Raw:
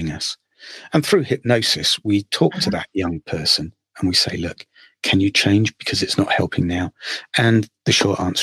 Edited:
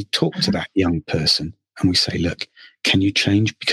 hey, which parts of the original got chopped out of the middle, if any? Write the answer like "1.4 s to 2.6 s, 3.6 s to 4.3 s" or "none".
none